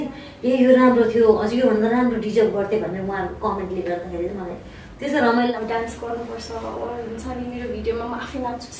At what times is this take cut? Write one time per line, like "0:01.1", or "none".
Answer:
0:05.5

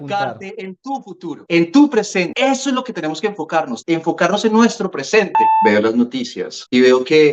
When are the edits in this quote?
0:05.5

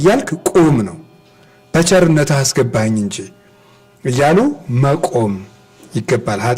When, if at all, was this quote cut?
none

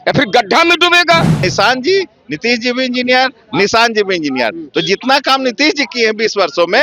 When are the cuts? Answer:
0:01.4

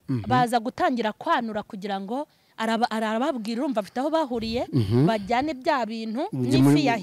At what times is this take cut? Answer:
none

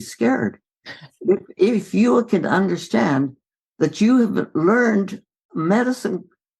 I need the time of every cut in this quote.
0:05.2

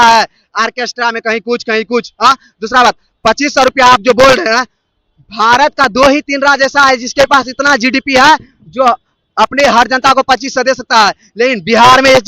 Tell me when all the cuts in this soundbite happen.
none

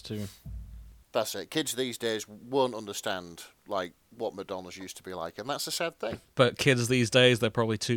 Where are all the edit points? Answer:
0:04.0
0:06.2

